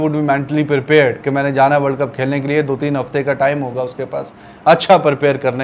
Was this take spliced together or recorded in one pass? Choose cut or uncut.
uncut